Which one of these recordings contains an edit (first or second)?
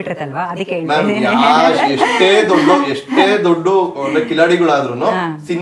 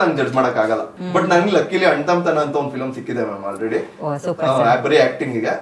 second